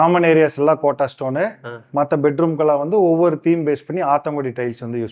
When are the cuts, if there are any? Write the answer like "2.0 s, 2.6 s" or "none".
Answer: none